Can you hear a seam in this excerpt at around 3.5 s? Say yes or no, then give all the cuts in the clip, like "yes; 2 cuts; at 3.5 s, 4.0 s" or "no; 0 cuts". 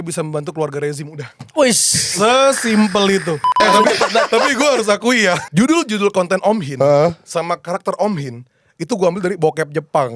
yes; 2 cuts; at 3.5 s, 5.4 s